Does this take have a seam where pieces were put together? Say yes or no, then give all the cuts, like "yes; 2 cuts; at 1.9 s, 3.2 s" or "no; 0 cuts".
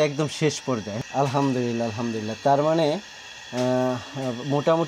yes; 1 cut; at 0.9 s